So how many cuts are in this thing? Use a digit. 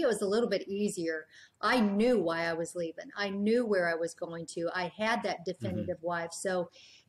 0